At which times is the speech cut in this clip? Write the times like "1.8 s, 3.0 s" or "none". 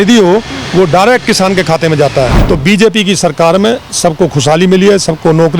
2.4 s